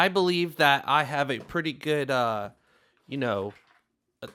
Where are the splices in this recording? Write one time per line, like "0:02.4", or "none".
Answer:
none